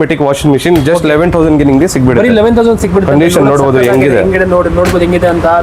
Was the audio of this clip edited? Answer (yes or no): no